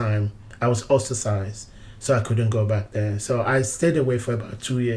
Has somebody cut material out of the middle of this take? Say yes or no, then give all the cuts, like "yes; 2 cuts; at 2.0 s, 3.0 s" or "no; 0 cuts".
no; 0 cuts